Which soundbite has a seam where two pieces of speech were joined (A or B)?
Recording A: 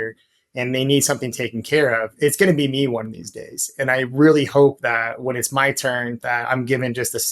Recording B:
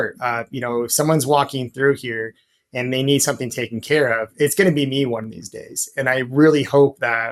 A